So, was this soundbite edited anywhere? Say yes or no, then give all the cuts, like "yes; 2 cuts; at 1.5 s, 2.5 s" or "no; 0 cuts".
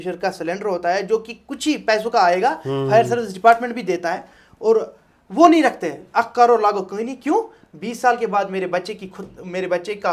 no; 0 cuts